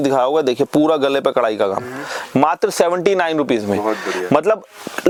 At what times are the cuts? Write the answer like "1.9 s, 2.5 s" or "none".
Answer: none